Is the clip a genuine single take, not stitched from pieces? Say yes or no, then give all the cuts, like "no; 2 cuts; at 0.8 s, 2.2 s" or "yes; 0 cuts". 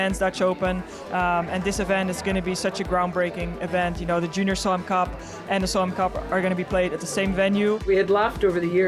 no; 1 cut; at 7.9 s